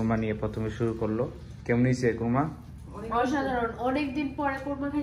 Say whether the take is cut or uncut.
uncut